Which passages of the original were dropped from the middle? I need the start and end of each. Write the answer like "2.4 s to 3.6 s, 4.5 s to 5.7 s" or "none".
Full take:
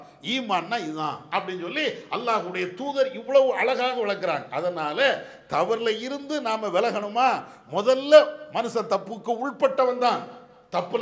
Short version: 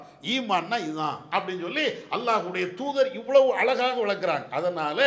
none

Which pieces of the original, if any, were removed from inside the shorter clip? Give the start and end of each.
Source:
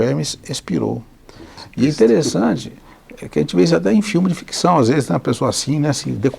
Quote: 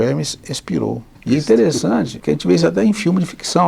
1.1 s to 1.6 s, 2.7 s to 3.2 s

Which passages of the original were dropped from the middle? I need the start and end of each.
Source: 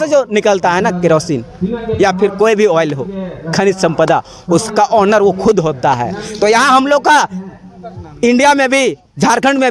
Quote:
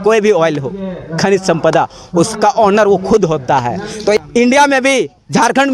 6.5 s to 8.0 s

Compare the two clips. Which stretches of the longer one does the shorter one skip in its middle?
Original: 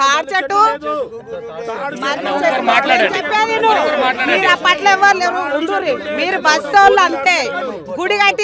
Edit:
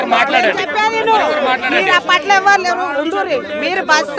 none

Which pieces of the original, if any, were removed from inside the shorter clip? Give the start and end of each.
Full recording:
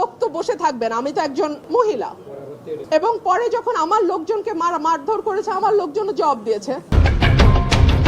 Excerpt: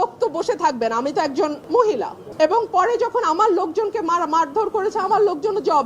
2.2 s to 2.7 s

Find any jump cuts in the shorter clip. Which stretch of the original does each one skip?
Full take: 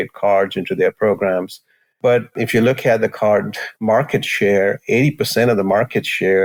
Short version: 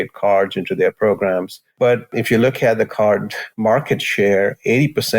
1.6 s to 1.8 s

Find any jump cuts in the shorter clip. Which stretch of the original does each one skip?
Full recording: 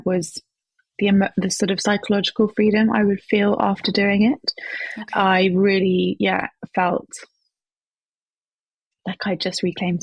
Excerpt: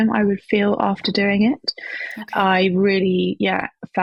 none

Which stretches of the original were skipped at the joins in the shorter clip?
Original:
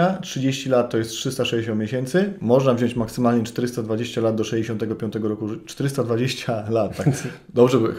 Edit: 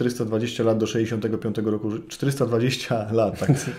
none

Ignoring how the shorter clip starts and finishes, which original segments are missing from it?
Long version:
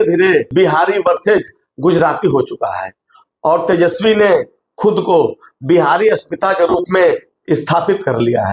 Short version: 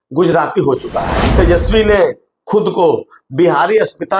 3.0 s to 3.6 s

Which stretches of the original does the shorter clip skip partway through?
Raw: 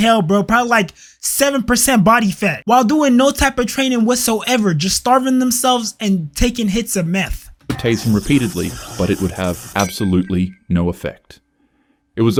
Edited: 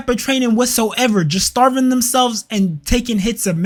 none

